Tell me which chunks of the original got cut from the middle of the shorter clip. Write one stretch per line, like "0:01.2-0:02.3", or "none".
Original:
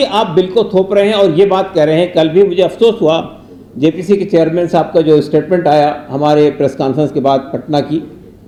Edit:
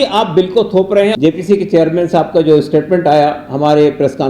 0:01.1-0:03.7

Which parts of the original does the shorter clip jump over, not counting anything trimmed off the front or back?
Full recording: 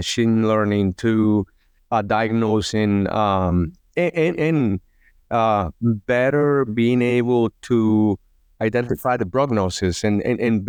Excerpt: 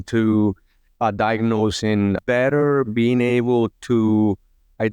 0:03.1-0:06.0

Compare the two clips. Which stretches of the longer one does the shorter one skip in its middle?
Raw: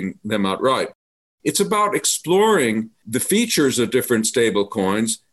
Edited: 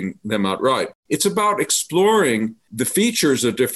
0:01.0-0:01.3

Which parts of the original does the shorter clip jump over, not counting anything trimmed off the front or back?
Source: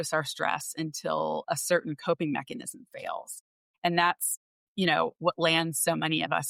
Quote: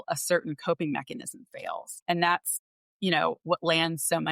0:03.3-0:03.6

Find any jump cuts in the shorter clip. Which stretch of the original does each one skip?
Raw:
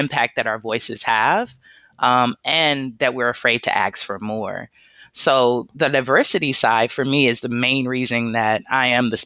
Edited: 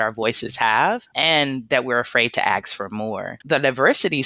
0:01.6-0:02.4
0:04.7-0:05.7

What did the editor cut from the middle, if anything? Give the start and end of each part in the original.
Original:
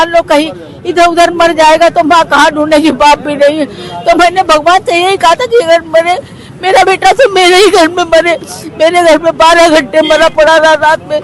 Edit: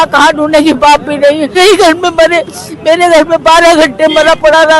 0:03.7-0:07.5

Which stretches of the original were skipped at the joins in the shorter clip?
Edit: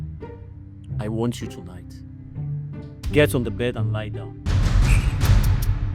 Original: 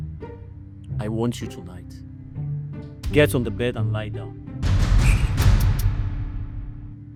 0:04.4-0:04.6

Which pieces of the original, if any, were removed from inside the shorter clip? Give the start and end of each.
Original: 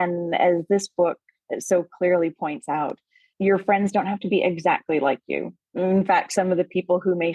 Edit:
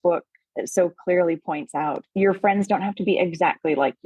0:03.0-0:03.3

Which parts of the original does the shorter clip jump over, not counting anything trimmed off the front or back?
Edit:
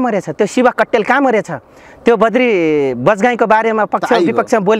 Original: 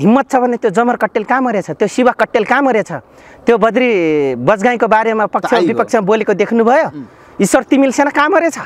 none

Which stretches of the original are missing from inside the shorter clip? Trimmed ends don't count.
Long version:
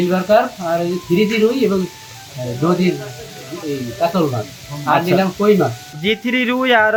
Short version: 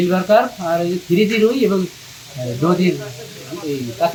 none

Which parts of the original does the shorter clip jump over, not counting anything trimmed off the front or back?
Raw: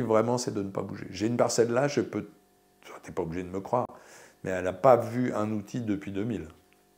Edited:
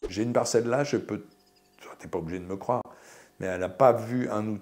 none

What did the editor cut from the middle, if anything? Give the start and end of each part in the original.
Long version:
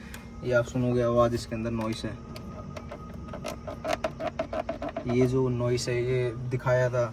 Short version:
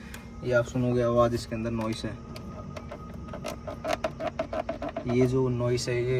none

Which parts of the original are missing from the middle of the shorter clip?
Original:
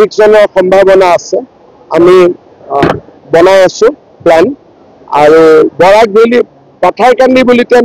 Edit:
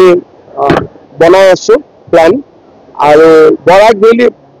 none

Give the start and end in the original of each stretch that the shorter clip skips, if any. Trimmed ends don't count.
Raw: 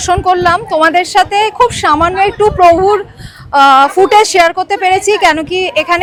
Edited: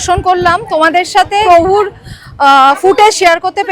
0:01.4-0:02.6

